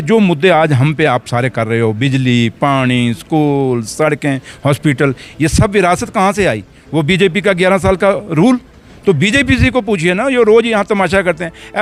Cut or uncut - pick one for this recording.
uncut